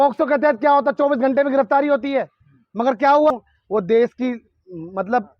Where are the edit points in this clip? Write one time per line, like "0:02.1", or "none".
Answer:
0:03.3